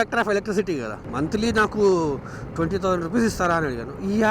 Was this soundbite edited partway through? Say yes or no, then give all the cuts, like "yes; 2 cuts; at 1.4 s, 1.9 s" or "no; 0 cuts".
yes; 1 cut; at 1.0 s